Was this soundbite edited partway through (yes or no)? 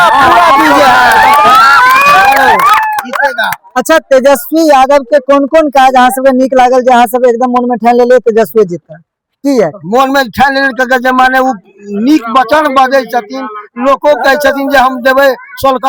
no